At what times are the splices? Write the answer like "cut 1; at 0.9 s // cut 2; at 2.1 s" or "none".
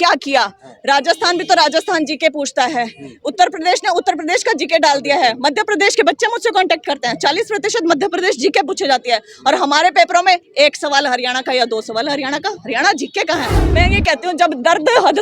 cut 1; at 13.7 s